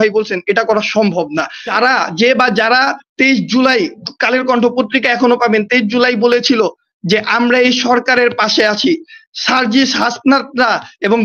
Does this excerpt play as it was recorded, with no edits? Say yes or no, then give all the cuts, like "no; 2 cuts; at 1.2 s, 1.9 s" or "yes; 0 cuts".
no; 1 cut; at 1.7 s